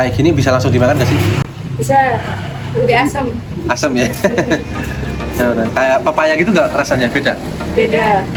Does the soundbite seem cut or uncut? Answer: uncut